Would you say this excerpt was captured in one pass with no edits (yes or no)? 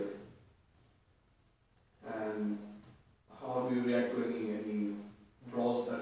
yes